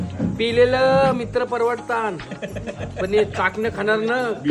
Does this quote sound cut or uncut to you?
uncut